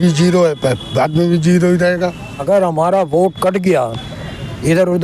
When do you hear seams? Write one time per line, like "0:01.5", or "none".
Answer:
0:02.4